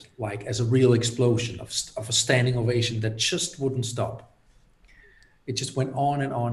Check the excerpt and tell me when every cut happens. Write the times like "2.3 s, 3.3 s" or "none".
none